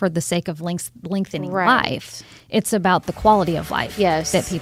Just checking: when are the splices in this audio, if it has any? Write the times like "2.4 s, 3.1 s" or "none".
none